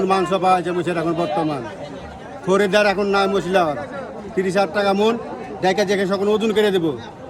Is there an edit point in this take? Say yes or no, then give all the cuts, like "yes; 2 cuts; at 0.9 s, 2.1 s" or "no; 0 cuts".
no; 0 cuts